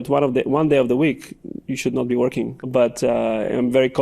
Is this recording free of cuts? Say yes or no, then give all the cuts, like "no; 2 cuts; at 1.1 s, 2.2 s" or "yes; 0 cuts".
no; 1 cut; at 2.6 s